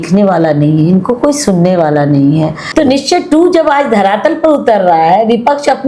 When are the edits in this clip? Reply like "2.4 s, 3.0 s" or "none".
2.6 s